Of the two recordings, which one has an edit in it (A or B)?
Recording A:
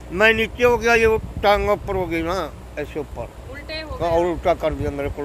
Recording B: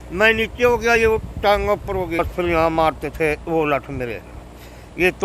B